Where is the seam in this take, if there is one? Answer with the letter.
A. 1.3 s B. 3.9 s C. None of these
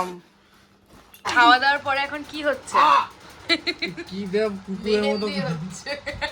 A